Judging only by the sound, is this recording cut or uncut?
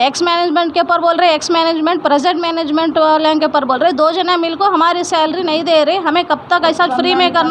uncut